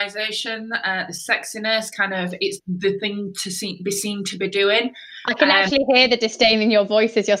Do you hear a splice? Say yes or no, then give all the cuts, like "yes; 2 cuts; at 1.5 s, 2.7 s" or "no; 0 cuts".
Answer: no; 0 cuts